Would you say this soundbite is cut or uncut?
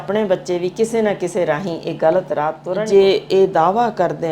cut